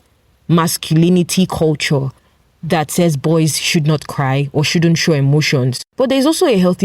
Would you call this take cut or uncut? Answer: cut